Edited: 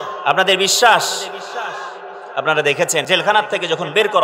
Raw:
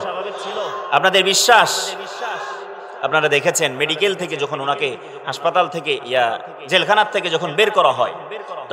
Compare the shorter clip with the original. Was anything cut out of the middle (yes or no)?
yes